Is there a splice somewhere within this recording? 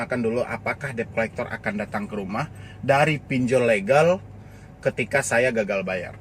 no; 0 cuts

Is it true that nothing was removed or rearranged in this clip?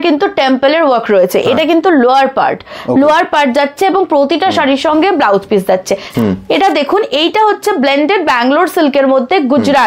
no; 1 cut; at 6.1 s

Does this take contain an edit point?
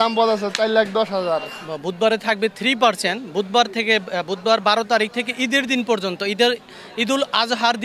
yes; 1 cut; at 1.6 s

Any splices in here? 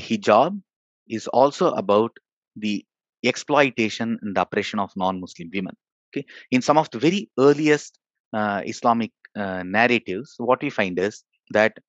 no; 0 cuts

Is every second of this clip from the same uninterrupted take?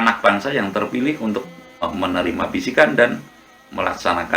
no; 1 cut; at 1.8 s

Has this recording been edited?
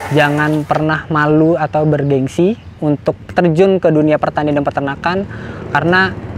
no; 0 cuts

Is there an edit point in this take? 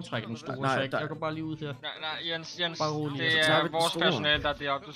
no; 0 cuts

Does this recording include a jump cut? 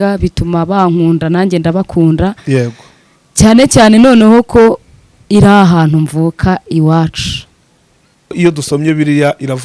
yes; 1 cut; at 8.3 s

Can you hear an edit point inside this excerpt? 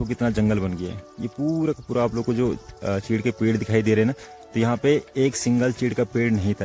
no; 0 cuts

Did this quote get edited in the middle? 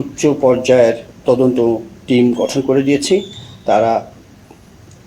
no; 0 cuts

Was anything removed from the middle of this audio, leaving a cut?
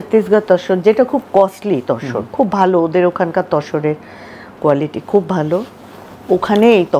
no; 0 cuts

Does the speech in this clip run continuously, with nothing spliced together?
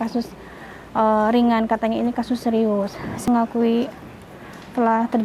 no; 1 cut; at 3.3 s

